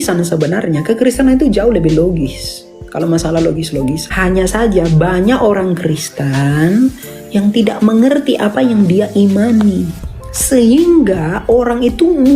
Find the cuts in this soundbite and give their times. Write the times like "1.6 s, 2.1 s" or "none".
4.1 s